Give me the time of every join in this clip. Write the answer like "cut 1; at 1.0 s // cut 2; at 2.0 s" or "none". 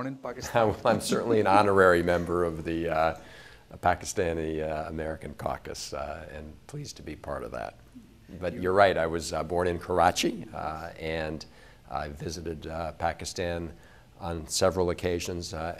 cut 1; at 9.3 s